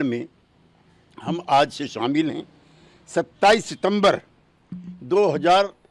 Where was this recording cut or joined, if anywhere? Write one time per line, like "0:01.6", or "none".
none